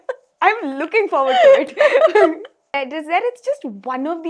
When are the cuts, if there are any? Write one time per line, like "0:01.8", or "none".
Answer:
0:02.7